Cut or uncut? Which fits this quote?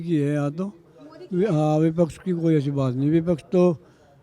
uncut